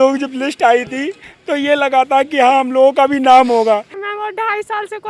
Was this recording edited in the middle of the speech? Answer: yes; 1 cut; at 4.0 s

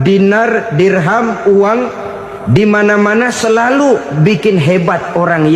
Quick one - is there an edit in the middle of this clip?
no; 0 cuts

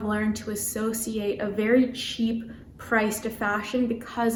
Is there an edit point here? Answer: no; 0 cuts

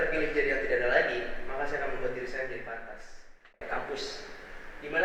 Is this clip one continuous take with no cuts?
no; 1 cut; at 3.6 s

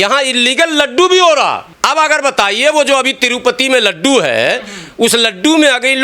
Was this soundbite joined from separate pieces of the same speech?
yes; 1 cut; at 1.7 s

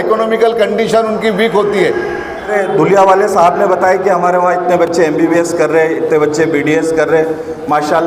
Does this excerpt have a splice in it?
yes; 1 cut; at 2.5 s

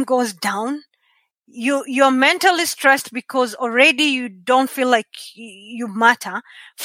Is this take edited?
no; 0 cuts

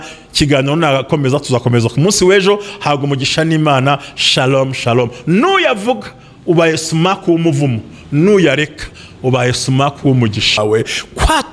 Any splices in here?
yes; 1 cut; at 10.6 s

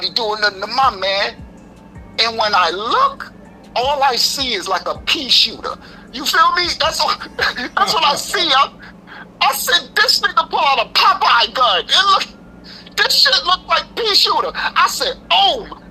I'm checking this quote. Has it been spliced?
no; 0 cuts

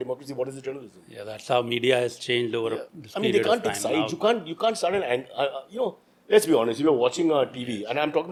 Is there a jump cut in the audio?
no; 0 cuts

